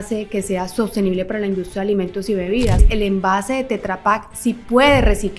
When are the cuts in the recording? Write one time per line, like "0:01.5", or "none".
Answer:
0:02.8